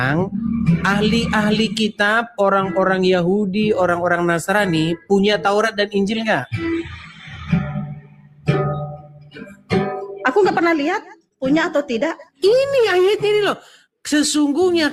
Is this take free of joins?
yes; 0 cuts

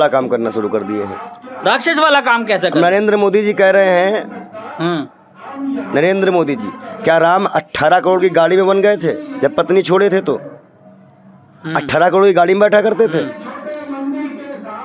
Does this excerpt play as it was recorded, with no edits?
yes; 0 cuts

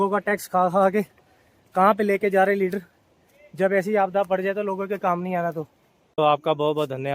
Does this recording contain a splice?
yes; 1 cut; at 6.2 s

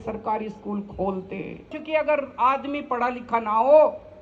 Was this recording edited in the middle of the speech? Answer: yes; 1 cut; at 1.8 s

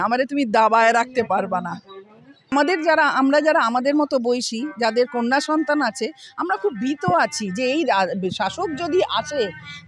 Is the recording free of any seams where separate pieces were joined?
no; 1 cut; at 2.5 s

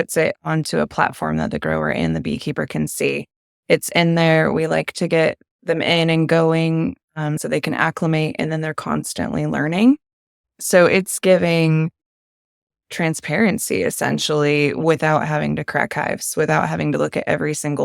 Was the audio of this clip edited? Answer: no; 0 cuts

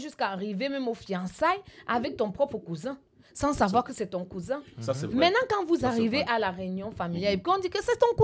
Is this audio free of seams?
yes; 0 cuts

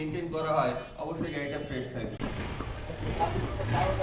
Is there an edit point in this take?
yes; 1 cut; at 2.2 s

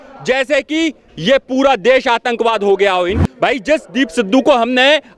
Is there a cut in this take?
yes; 1 cut; at 3.2 s

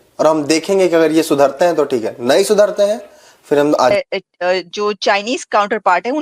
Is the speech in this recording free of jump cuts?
no; 1 cut; at 3.9 s

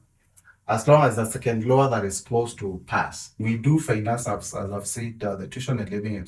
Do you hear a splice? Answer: yes; 1 cut; at 3.4 s

